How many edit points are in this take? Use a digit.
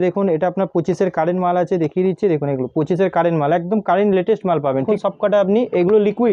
1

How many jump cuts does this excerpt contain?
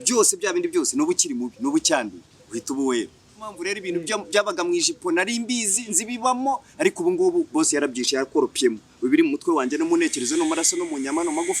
1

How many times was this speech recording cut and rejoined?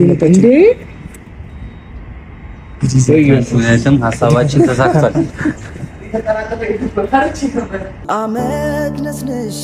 1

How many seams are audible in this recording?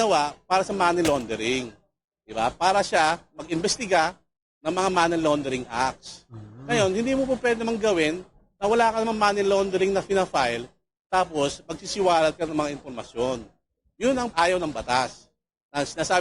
1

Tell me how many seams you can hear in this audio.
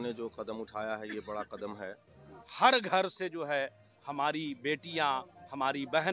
1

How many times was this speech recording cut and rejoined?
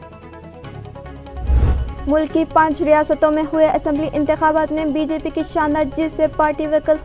1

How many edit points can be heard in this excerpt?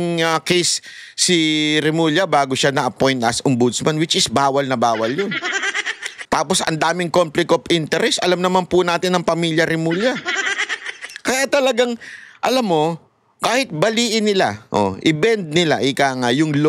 0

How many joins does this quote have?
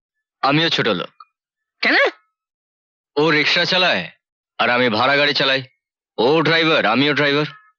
0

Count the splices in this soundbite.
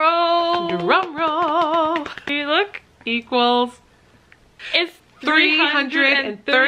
2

